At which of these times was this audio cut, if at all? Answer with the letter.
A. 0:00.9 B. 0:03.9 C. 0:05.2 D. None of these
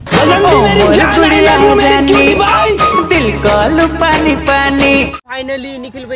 C